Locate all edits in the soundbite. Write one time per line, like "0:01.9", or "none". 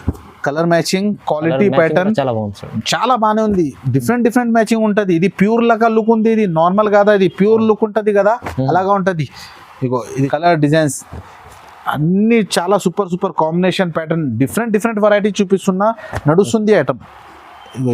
0:10.3